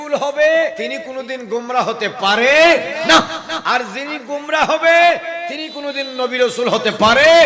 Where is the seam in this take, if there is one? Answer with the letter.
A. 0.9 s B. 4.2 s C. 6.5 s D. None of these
A